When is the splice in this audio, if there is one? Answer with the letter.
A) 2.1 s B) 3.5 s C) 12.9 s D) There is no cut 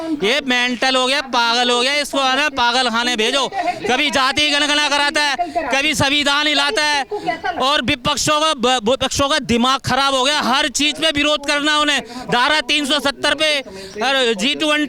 D